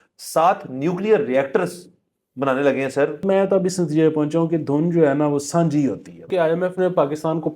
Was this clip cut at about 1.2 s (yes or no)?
no